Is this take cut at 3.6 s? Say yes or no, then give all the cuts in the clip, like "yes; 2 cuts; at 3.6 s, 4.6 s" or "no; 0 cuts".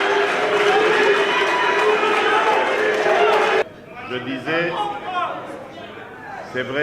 yes; 1 cut; at 3.6 s